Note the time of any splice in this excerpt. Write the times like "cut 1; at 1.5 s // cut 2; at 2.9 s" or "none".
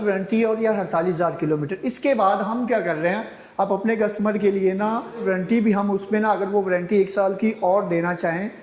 cut 1; at 5.2 s